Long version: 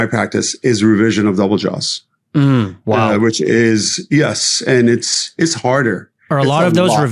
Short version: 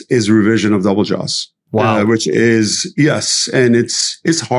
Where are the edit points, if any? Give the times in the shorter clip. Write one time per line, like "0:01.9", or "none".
0:01.6

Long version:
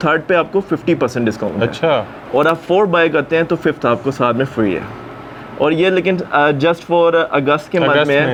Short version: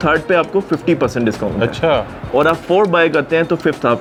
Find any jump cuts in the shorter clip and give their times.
none

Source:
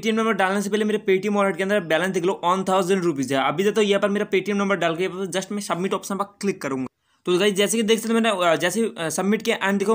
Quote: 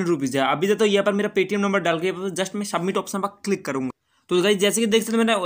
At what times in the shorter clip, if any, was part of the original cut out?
none

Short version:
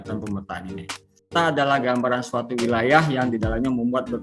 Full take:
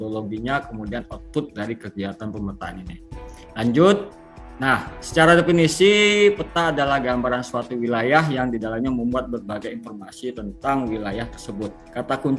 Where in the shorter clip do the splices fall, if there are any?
0:01.2

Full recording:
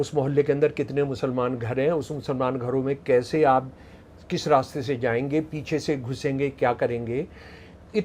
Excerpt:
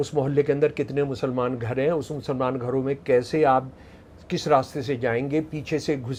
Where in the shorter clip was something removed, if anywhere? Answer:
none

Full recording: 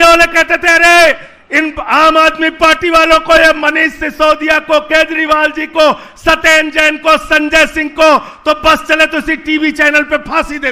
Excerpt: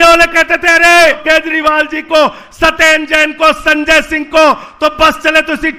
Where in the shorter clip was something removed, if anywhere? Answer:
0:01.2

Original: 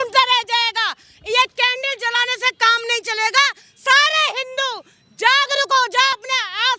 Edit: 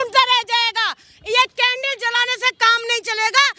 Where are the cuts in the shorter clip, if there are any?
none

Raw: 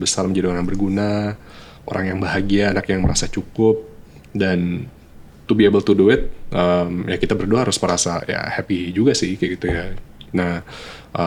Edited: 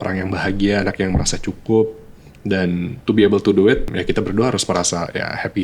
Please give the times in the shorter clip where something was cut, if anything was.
0:02.9
0:03.9

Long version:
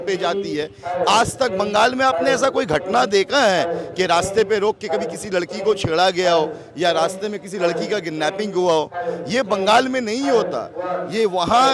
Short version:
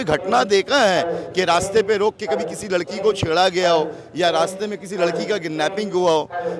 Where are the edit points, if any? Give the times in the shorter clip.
none

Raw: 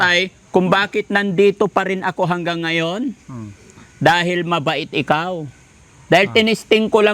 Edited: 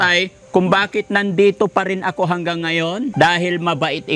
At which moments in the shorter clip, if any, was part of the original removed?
0:03.1

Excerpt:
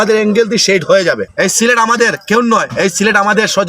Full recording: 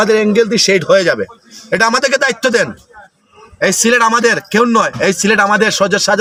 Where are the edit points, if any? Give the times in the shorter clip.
0:01.3

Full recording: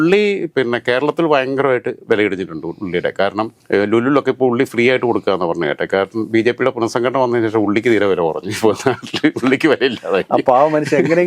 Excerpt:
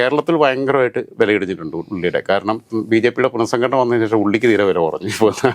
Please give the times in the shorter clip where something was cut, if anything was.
0:02.7

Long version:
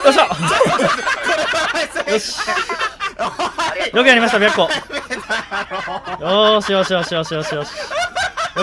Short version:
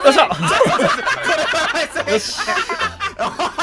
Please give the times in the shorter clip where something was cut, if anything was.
none

